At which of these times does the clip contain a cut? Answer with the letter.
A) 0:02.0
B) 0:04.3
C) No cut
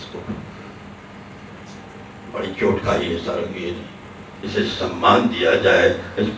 B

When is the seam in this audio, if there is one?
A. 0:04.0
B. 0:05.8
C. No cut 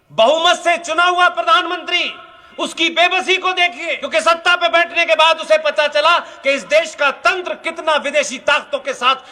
A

